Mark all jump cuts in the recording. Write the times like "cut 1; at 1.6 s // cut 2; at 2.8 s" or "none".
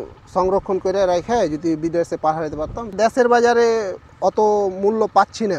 cut 1; at 2.9 s